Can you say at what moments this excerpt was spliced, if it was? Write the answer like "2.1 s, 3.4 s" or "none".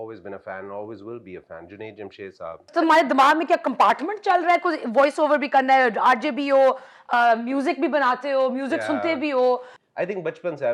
2.7 s, 9.7 s